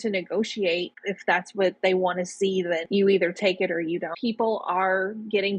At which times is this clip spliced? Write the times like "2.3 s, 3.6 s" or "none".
4.2 s